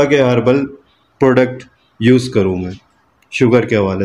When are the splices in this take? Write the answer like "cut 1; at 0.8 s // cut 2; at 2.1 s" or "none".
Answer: none